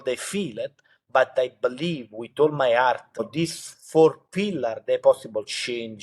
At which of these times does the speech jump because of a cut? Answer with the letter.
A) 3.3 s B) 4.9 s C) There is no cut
A